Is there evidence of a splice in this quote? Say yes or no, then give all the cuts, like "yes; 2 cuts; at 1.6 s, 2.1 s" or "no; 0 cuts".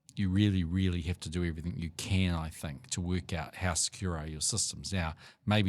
no; 0 cuts